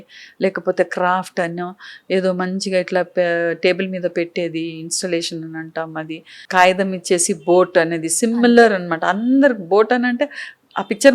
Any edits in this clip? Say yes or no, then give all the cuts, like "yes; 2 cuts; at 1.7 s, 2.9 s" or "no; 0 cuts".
yes; 1 cut; at 6.3 s